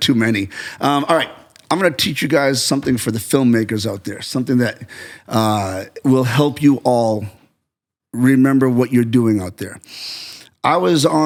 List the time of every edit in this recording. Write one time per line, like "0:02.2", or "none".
none